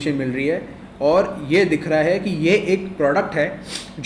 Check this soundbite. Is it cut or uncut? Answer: uncut